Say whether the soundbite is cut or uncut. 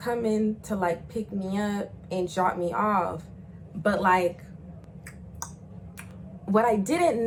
uncut